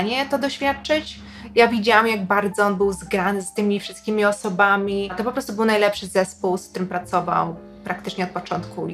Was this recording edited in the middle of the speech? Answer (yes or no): yes